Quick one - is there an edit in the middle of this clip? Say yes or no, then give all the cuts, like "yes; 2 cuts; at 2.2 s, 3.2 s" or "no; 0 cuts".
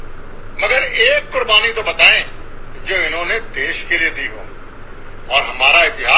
no; 0 cuts